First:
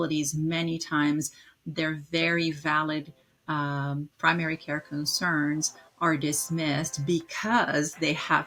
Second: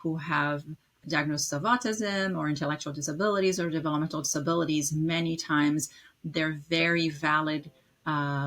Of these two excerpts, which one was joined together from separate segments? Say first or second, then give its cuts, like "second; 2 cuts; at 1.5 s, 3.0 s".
second; 1 cut; at 1.0 s